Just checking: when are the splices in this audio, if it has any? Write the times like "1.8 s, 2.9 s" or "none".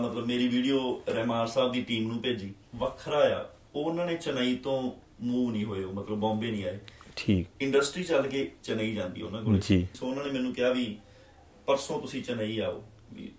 2.6 s, 10.0 s